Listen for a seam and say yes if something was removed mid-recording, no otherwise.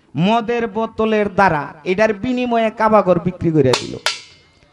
no